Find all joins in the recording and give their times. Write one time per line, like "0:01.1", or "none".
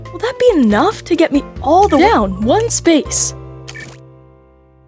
0:02.0
0:03.0